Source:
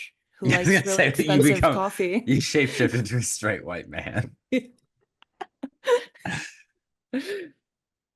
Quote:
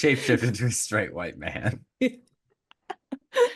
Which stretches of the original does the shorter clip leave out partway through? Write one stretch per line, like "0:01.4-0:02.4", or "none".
none